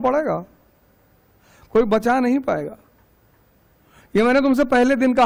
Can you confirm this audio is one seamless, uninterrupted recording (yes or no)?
yes